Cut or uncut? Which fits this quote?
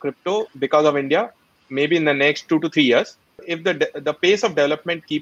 cut